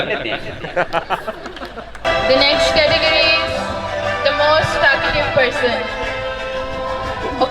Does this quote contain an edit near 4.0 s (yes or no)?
no